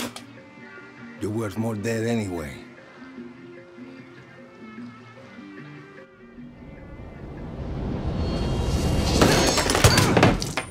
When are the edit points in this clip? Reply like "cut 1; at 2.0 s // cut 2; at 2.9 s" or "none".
none